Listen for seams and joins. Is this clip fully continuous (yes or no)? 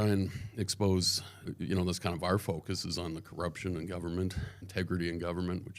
no